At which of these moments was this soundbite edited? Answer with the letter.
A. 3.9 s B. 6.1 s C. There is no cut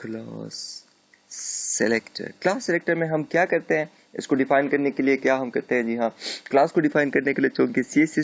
C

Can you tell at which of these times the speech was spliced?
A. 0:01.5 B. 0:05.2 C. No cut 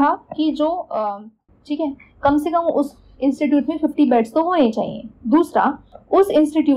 A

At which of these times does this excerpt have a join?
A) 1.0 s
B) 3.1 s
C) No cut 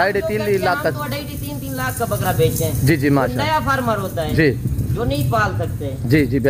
C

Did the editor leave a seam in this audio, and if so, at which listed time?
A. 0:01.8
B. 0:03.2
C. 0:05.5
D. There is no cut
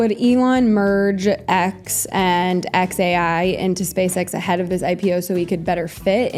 D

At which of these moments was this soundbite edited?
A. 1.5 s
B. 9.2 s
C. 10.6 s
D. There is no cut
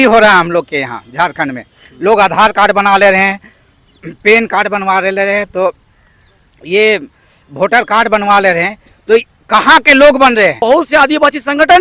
C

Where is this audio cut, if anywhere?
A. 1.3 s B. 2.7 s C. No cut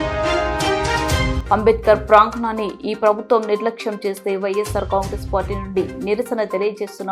A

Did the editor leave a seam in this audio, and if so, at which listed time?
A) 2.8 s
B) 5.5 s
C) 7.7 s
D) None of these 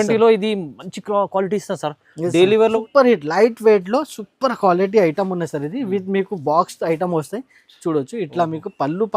A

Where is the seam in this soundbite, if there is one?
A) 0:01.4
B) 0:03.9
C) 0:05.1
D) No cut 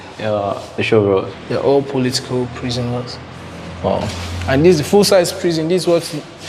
A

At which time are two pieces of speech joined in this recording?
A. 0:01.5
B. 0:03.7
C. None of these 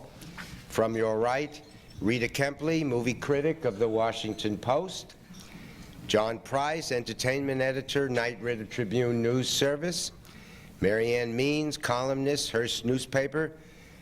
B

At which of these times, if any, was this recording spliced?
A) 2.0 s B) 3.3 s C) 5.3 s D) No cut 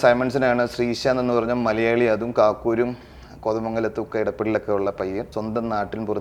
C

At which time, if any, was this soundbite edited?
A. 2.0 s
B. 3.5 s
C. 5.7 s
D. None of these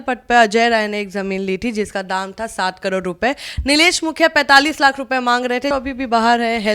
C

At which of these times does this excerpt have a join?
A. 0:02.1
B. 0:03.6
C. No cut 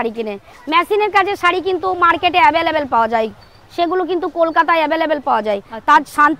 C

